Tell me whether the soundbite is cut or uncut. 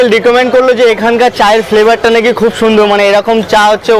uncut